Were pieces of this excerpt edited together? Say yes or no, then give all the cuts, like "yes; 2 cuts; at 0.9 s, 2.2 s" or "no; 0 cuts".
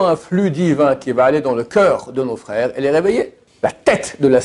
yes; 1 cut; at 3.4 s